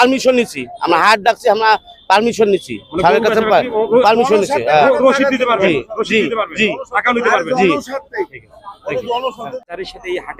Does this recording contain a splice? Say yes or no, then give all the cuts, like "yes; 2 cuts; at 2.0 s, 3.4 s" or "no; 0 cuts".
no; 0 cuts